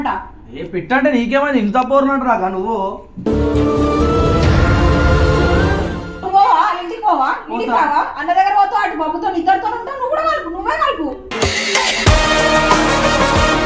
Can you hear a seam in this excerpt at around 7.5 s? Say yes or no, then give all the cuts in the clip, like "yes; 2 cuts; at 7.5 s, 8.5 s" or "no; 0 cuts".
no; 1 cut; at 6.2 s